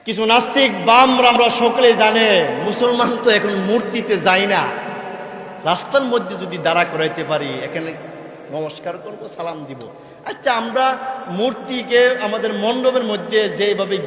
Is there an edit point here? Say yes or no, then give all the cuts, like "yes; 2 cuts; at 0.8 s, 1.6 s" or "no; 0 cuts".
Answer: yes; 1 cut; at 1.3 s